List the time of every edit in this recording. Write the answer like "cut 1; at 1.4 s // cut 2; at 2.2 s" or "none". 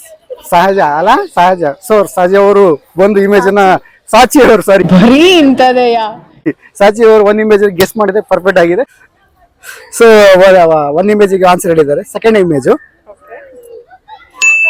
none